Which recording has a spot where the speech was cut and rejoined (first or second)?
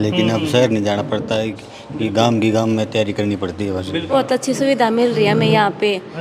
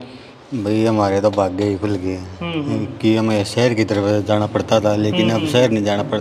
first